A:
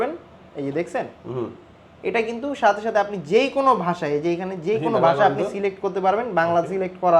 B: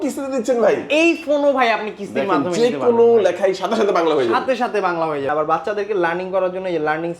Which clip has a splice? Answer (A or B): B